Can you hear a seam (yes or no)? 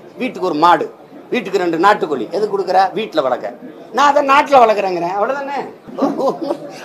yes